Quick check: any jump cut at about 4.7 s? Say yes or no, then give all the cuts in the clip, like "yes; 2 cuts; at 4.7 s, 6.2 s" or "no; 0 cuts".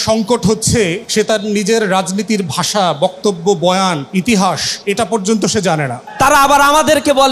yes; 4 cuts; at 1.0 s, 4.0 s, 4.7 s, 6.0 s